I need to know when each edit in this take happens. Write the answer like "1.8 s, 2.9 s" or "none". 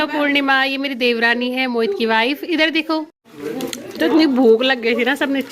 3.2 s